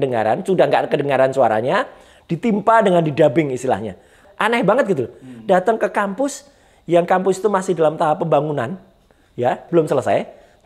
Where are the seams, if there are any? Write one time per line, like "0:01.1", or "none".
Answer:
0:04.2
0:09.6